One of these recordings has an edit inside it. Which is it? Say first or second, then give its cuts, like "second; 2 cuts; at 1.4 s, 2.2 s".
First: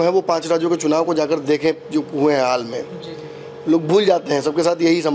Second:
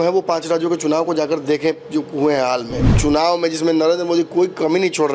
second; 1 cut; at 2.9 s